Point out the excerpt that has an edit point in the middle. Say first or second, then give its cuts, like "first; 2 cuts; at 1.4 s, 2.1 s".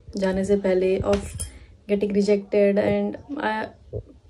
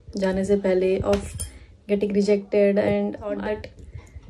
second; 1 cut; at 3.4 s